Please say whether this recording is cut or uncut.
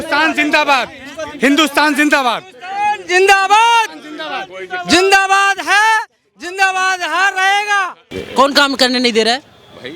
cut